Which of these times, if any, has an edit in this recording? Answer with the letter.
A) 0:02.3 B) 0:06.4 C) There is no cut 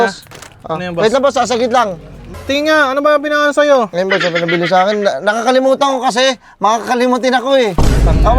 A